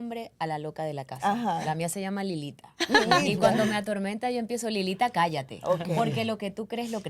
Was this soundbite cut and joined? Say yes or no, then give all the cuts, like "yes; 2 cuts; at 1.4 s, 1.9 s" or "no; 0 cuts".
no; 0 cuts